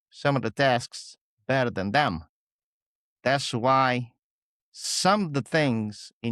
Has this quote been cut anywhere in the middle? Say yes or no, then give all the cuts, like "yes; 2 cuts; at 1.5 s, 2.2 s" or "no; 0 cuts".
no; 0 cuts